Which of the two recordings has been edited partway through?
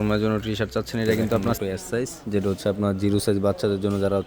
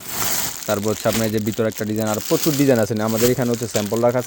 first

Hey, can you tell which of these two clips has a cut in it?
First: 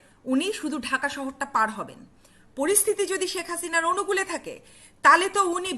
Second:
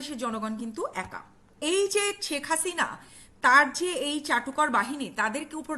second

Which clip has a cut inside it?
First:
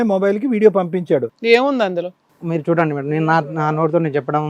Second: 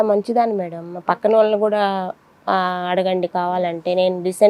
first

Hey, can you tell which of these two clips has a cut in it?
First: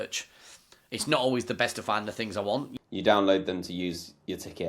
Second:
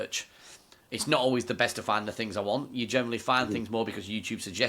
first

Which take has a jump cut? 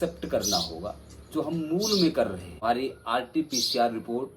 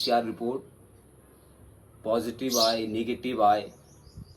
first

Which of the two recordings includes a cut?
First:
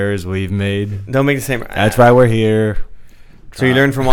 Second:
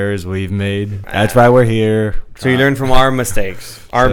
second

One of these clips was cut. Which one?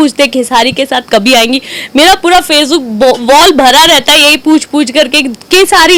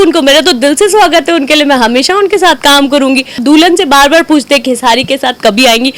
second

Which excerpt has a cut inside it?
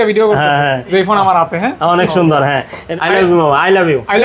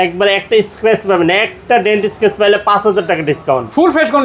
first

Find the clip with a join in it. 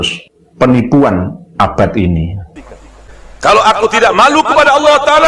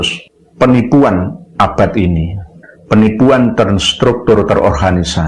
first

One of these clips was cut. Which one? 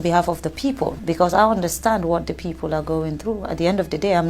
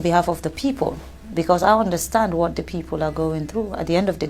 first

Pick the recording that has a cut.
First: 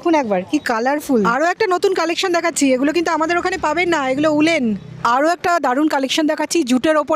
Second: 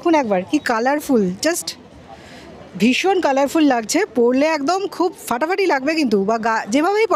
first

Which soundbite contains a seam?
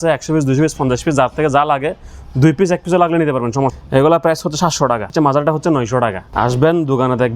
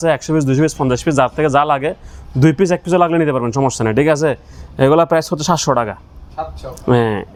first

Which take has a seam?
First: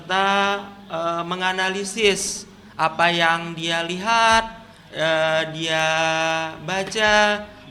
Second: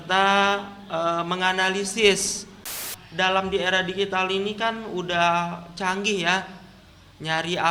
second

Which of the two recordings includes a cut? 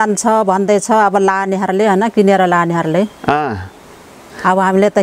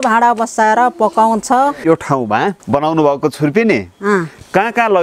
second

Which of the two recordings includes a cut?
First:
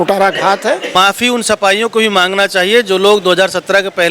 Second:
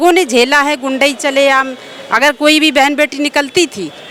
first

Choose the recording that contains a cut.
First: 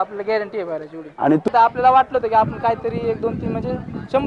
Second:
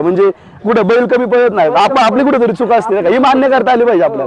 first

